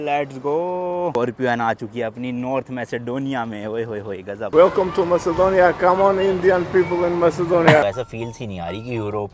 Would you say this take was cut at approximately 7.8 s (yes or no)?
yes